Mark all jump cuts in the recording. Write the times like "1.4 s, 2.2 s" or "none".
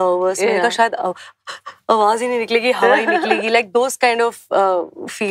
none